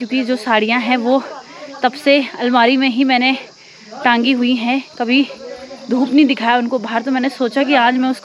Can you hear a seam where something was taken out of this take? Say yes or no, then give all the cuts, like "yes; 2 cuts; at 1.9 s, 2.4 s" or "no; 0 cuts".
no; 0 cuts